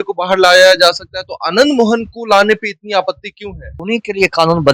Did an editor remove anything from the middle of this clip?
yes; 1 cut; at 3.7 s

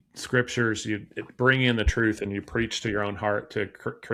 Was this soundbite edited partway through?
no; 0 cuts

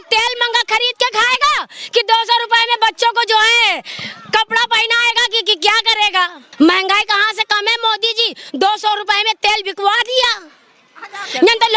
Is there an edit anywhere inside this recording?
yes; 1 cut; at 6.4 s

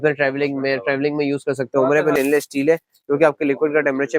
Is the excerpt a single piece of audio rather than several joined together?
no; 1 cut; at 2.1 s

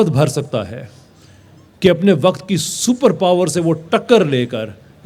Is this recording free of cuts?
yes; 0 cuts

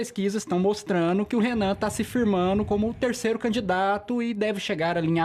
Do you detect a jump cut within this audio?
no; 0 cuts

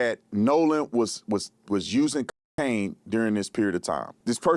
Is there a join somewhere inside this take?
no; 0 cuts

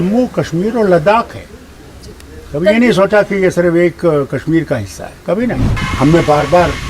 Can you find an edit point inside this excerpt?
yes; 1 cut; at 5.7 s

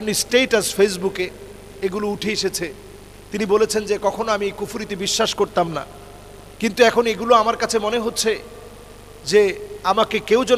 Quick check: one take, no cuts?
yes; 0 cuts

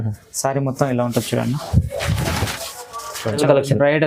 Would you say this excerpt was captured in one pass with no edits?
yes; 0 cuts

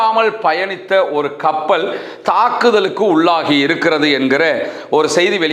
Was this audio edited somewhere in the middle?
no; 0 cuts

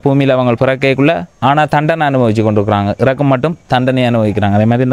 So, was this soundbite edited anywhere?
no; 0 cuts

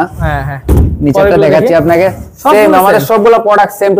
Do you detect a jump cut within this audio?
no; 0 cuts

